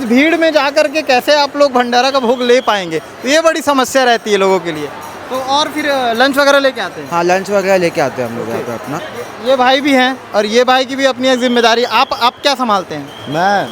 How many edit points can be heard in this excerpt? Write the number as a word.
zero